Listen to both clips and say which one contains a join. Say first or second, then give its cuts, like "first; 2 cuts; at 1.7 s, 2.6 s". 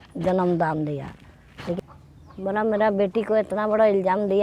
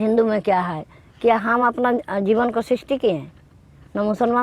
first; 1 cut; at 1.8 s